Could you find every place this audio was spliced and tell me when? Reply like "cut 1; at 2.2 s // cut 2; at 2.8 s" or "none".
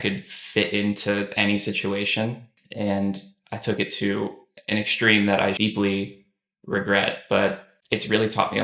cut 1; at 7.7 s